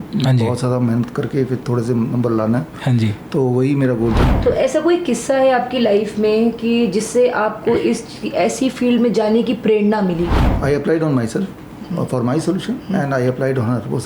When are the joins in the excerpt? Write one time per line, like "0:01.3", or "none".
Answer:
0:04.3
0:10.5